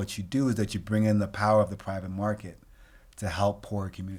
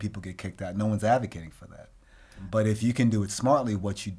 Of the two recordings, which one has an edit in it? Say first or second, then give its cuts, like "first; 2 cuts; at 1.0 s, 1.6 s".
second; 1 cut; at 2.5 s